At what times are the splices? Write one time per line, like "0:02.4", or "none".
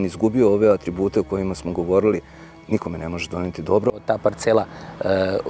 0:03.9